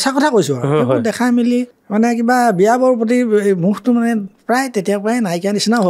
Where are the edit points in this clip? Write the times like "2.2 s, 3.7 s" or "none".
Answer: 1.8 s